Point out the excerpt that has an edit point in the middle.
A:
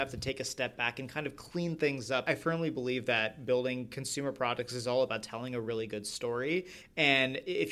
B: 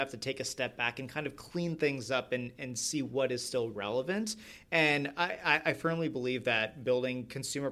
A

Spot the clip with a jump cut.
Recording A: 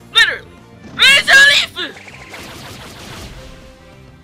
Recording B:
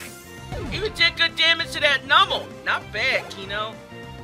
B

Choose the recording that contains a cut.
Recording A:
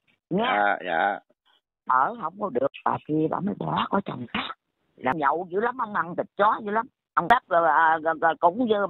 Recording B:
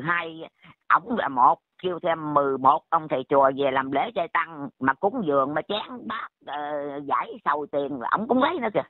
A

